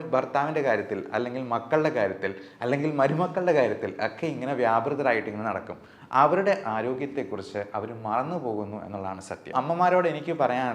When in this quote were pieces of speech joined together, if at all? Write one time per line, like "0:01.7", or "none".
0:09.5